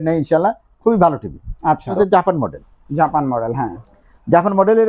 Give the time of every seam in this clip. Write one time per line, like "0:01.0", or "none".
0:01.9